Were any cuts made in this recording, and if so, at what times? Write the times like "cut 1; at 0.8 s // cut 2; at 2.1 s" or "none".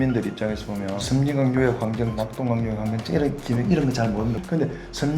cut 1; at 1.0 s // cut 2; at 2.1 s // cut 3; at 4.4 s